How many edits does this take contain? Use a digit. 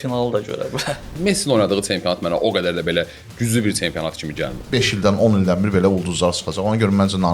2